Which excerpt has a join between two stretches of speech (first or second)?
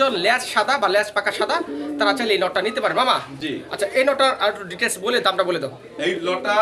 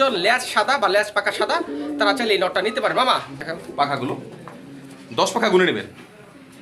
second